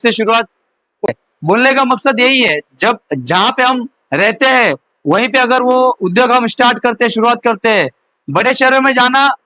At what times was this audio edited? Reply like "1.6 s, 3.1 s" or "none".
1.1 s